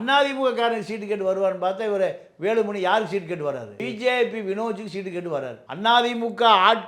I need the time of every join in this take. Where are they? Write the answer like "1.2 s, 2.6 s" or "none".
3.8 s, 5.6 s